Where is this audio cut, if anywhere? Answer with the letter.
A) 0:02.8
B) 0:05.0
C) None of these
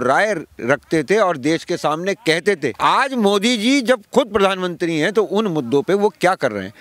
A